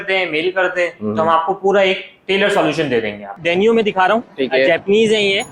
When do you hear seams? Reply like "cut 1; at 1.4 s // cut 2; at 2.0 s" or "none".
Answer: cut 1; at 3.3 s